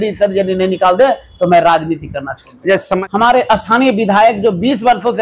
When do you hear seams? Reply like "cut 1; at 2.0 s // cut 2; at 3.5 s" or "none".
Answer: cut 1; at 3.0 s